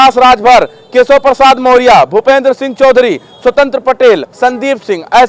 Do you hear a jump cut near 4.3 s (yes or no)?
yes